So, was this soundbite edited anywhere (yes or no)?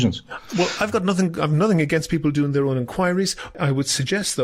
yes